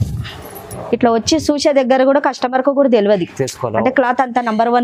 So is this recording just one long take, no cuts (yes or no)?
yes